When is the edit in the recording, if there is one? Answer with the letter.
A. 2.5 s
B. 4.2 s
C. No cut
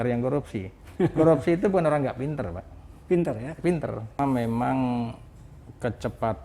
B